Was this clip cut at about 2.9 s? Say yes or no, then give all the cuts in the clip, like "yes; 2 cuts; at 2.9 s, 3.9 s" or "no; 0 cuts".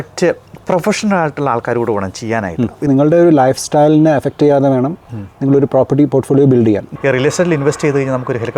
yes; 2 cuts; at 2.9 s, 6.9 s